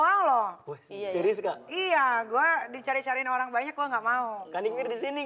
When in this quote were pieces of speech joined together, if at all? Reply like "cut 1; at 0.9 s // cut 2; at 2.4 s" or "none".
none

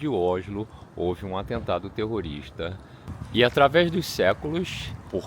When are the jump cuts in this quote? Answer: cut 1; at 3.1 s

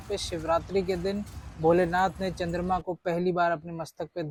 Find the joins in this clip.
none

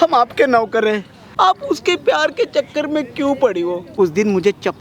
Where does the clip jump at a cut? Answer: cut 1; at 1.2 s // cut 2; at 3.8 s

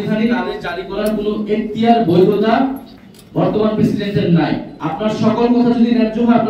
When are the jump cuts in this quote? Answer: cut 1; at 4.7 s

